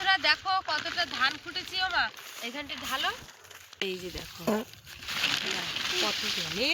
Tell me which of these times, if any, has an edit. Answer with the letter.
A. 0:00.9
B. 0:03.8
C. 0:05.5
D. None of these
B